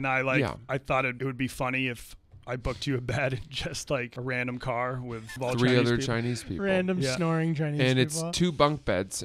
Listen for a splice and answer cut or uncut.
cut